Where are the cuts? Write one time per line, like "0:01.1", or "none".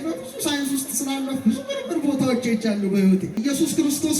0:03.3